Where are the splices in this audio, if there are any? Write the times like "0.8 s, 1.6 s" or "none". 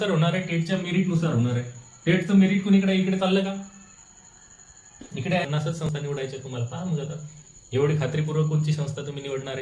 5.5 s